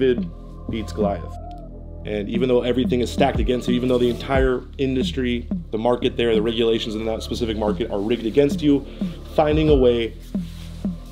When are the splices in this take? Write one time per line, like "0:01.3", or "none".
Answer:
0:01.6